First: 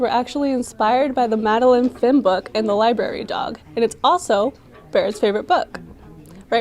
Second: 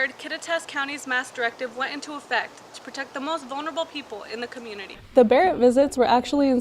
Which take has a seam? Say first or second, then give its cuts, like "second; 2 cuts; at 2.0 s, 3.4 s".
second; 1 cut; at 5.0 s